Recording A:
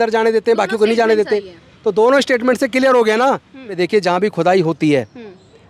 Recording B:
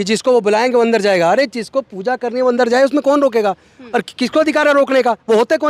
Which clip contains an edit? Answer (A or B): A